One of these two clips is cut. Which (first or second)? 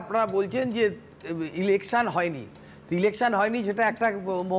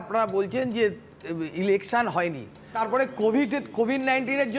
second